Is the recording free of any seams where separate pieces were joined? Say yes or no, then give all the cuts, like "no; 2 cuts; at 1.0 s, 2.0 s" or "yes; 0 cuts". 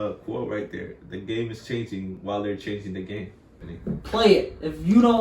no; 1 cut; at 3.7 s